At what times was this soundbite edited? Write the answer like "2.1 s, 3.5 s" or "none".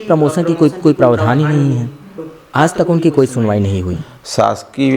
3.9 s